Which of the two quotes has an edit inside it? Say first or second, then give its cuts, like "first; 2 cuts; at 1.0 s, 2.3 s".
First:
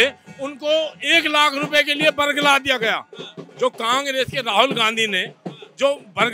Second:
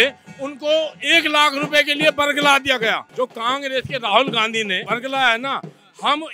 second; 2 cuts; at 3.0 s, 4.8 s